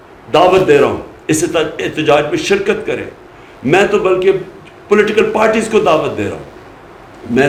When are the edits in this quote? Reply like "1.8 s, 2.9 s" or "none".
none